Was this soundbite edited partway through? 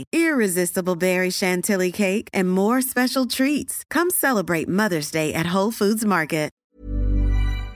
yes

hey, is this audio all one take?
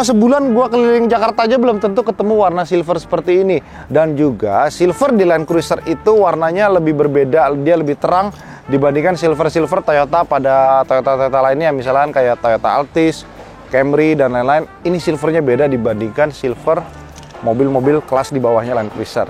yes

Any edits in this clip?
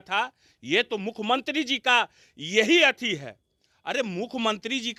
no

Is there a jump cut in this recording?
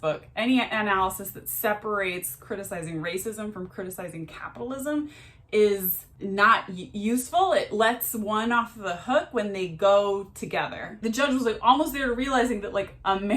yes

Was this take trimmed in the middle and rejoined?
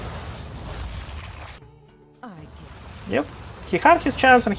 yes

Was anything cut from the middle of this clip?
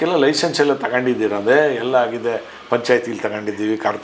no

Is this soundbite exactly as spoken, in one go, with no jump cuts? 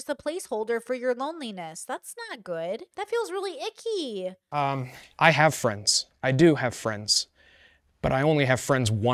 no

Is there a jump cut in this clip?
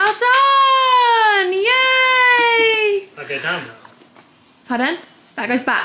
no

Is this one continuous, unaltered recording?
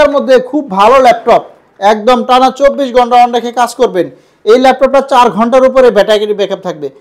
yes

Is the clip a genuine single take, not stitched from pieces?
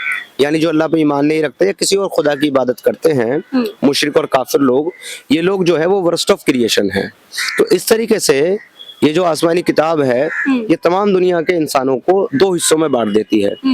yes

